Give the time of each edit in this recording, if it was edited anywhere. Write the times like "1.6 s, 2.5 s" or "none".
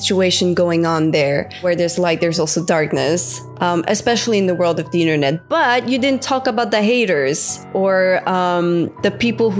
none